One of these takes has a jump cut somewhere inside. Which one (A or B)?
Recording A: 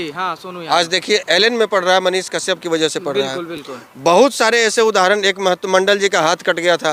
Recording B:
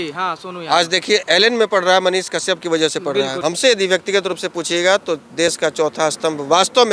B